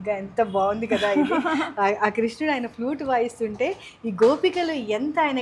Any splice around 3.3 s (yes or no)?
no